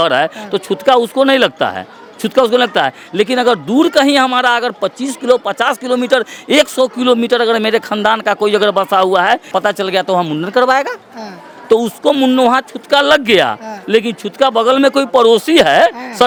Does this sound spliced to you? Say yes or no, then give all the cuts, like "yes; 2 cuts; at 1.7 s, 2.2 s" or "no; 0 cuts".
no; 0 cuts